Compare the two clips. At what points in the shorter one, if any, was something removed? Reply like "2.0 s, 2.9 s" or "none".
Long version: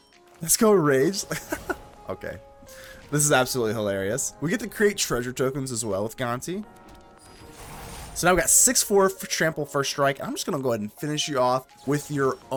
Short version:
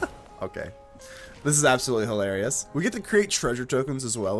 none